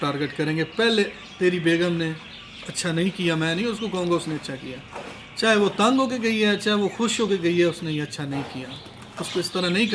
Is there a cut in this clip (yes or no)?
no